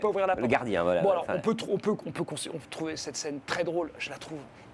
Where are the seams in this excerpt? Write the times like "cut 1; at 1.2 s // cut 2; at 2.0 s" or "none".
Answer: none